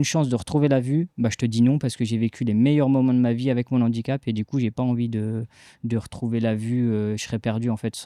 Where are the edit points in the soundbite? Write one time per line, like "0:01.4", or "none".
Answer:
none